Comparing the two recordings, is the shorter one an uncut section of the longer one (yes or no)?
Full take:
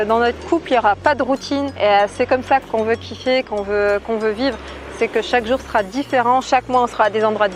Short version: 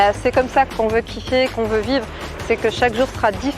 no